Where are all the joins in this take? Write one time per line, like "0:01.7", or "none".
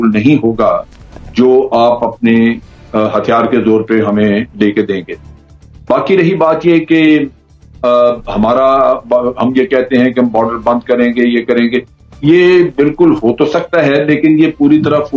none